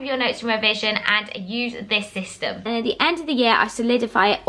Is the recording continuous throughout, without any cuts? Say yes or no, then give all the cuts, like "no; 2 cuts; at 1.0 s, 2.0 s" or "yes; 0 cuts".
no; 1 cut; at 2.6 s